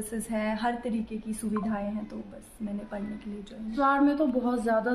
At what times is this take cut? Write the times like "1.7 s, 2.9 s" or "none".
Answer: 3.7 s